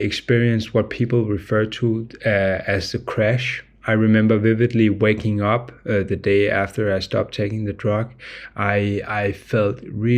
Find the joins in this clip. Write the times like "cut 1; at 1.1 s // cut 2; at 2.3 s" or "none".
none